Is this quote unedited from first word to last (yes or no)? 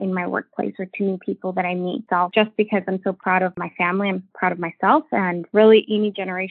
no